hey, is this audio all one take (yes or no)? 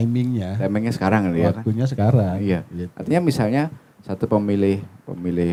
yes